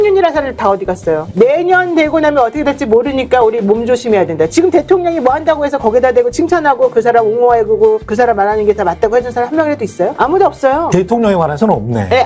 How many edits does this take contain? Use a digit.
1